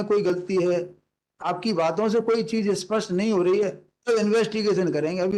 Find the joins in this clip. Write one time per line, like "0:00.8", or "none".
none